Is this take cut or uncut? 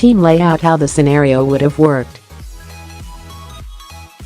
cut